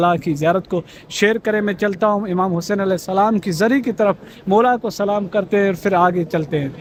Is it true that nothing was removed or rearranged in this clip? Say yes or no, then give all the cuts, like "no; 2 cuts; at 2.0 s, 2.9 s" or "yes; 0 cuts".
yes; 0 cuts